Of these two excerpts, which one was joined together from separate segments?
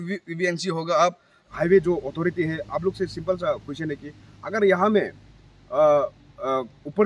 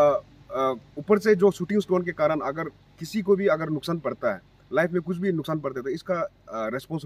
first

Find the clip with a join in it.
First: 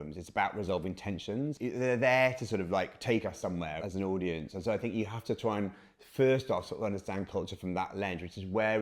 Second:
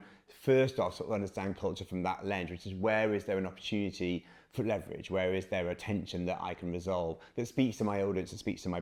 first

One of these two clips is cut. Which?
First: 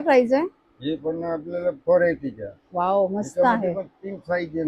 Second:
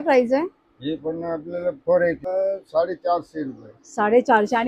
second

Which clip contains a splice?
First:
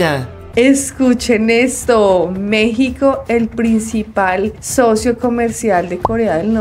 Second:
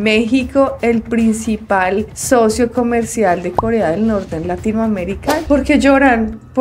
second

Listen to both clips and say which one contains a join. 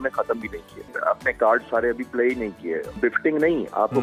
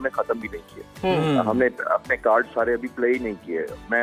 first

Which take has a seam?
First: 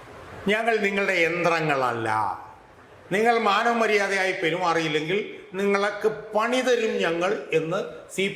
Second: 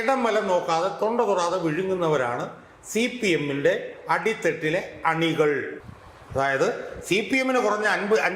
second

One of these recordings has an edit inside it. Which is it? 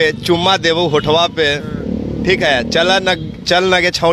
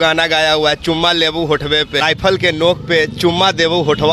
second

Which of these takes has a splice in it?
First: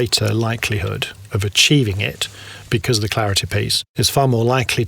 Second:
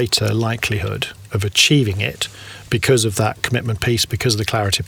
first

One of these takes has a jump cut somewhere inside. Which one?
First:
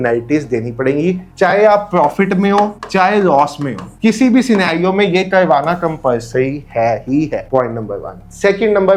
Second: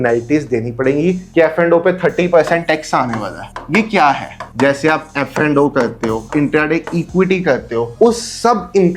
second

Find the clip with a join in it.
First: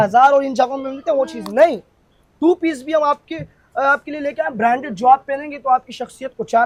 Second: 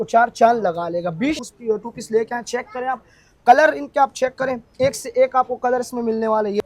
second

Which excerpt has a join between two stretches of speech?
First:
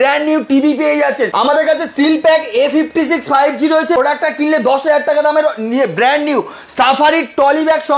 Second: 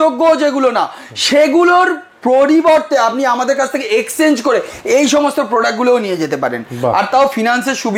first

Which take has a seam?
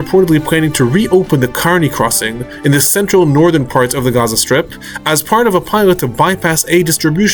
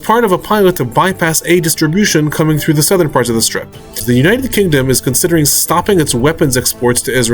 second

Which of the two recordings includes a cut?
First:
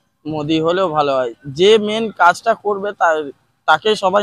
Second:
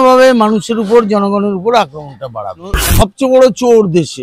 second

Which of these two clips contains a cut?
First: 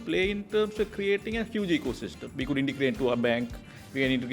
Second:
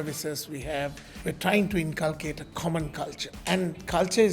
second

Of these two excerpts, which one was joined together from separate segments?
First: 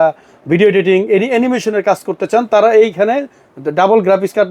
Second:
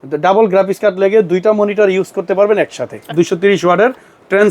second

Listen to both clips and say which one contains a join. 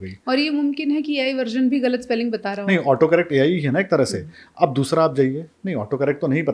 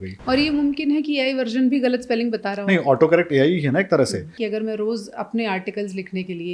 second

